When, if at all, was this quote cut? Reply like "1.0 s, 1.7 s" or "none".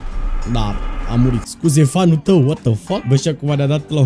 3.0 s